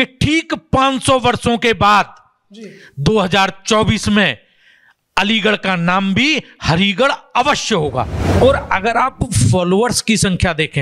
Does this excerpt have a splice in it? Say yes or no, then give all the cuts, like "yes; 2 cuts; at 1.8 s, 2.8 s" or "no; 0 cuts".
yes; 1 cut; at 8.2 s